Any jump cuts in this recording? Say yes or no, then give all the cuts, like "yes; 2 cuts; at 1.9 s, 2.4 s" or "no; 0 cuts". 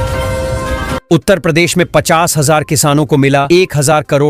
no; 0 cuts